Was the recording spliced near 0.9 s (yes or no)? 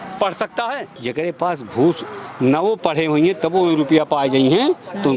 yes